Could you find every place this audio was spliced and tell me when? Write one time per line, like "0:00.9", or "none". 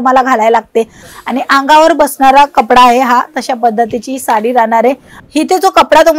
0:01.0
0:05.1